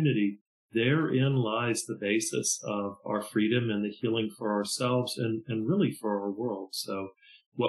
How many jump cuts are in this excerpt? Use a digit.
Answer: 1